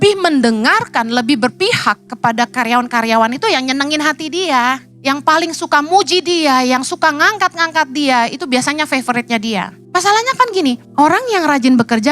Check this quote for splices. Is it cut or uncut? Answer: cut